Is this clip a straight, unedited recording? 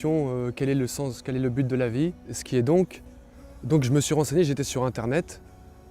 no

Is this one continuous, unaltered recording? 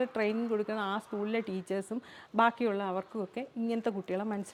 yes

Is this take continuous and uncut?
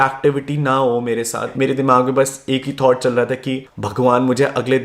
no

